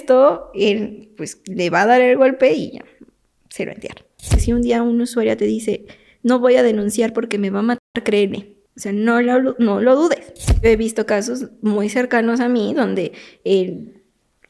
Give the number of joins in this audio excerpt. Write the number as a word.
two